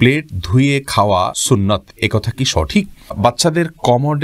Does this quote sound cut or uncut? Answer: cut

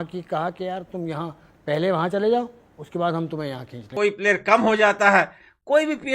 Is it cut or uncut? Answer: cut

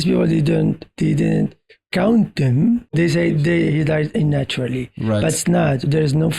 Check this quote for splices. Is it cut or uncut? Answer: cut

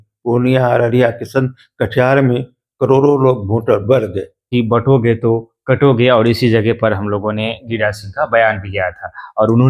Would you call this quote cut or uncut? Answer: cut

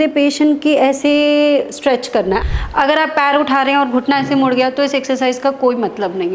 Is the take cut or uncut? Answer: cut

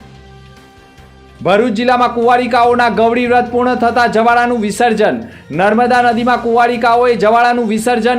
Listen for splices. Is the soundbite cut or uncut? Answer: cut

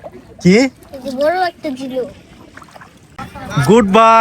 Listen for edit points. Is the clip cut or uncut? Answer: cut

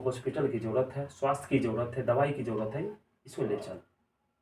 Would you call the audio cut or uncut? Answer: uncut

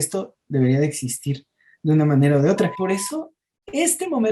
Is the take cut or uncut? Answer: cut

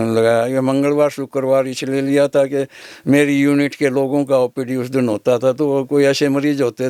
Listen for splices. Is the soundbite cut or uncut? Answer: uncut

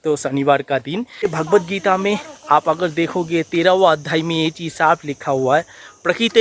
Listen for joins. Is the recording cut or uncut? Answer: cut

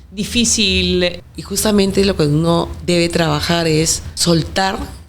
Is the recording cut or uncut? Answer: cut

